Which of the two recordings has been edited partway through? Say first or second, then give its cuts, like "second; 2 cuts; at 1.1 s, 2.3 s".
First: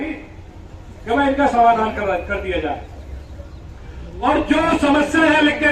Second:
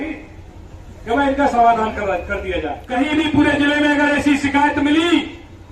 second; 1 cut; at 2.8 s